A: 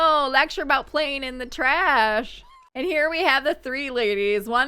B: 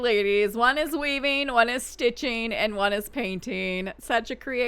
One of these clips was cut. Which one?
A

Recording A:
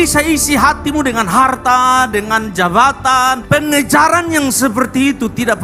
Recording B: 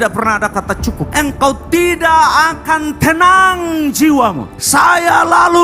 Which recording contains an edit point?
B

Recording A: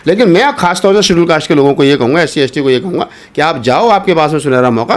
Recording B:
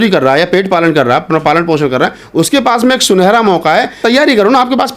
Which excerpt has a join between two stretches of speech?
B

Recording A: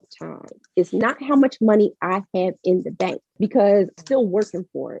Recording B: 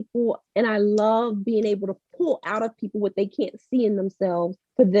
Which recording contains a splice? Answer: A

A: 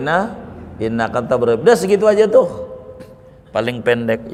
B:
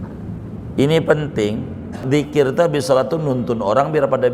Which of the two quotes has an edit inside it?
B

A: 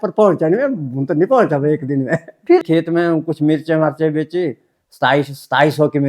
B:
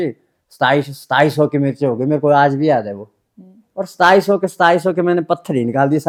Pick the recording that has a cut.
A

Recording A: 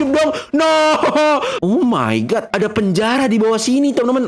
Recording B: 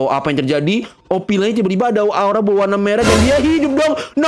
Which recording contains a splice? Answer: A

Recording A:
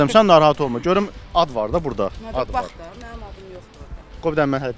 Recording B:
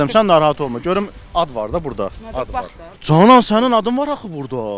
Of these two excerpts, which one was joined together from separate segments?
B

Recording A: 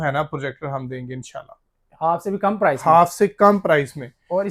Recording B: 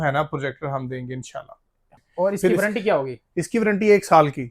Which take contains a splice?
B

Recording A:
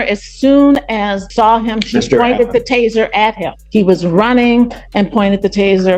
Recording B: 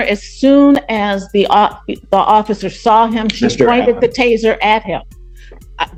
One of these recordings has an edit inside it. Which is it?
A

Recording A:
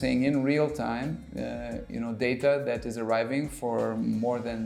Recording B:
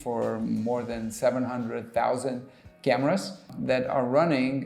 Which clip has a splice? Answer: B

